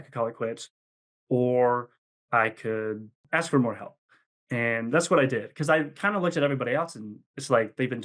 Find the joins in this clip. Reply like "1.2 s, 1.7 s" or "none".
3.2 s